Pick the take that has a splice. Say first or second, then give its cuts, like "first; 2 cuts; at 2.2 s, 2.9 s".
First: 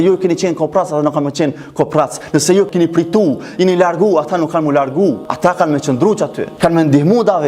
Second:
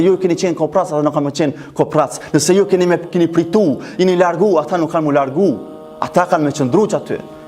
first; 3 cuts; at 2.7 s, 5.3 s, 6.4 s